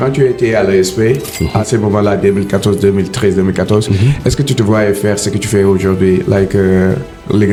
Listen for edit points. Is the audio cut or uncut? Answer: uncut